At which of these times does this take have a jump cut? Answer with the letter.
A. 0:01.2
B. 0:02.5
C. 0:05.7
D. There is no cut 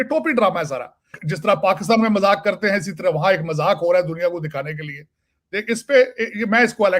A